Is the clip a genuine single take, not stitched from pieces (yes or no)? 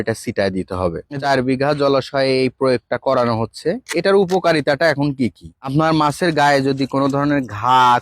no